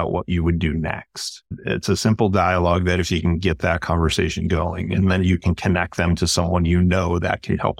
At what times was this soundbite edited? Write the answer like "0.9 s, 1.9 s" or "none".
1.6 s